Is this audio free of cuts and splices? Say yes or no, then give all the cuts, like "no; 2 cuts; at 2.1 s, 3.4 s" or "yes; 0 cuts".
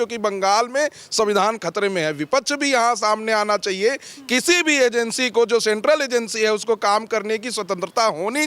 yes; 0 cuts